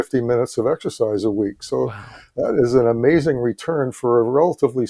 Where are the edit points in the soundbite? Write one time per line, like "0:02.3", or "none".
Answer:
none